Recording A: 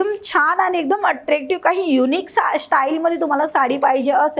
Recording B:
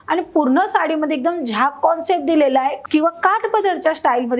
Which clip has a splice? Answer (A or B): B